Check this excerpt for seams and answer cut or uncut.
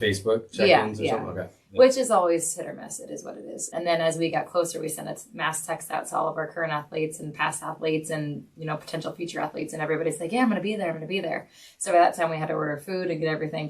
cut